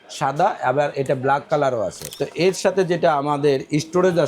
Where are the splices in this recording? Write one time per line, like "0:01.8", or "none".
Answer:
0:02.0